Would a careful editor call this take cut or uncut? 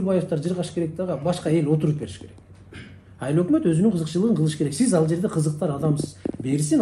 uncut